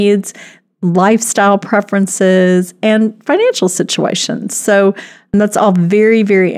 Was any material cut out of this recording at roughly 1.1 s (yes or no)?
no